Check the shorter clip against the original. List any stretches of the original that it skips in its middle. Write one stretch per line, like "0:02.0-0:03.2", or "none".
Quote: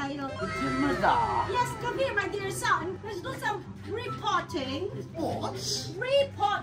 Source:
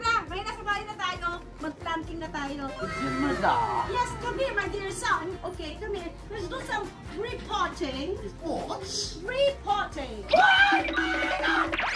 0:05.4-0:06.2